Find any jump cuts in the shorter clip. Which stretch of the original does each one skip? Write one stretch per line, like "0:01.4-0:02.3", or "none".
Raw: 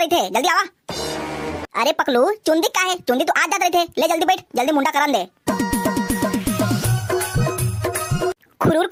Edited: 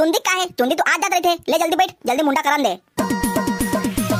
none